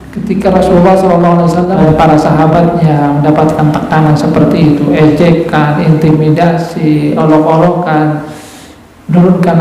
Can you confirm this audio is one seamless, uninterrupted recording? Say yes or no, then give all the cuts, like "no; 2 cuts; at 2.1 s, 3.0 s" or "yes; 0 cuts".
no; 1 cut; at 1.8 s